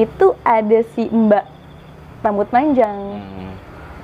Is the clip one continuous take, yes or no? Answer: yes